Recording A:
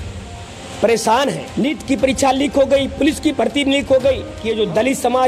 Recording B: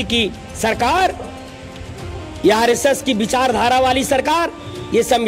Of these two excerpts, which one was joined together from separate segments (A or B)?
A